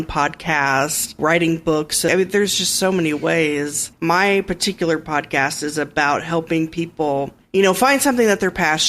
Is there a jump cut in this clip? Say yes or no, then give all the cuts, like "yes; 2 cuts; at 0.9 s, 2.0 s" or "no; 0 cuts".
yes; 4 cuts; at 1.2 s, 2.1 s, 3.9 s, 7.4 s